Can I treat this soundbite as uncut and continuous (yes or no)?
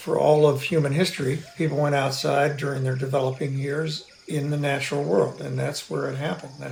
yes